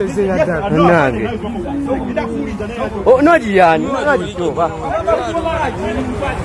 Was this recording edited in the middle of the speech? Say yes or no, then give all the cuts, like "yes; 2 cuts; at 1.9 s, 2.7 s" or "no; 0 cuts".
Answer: no; 0 cuts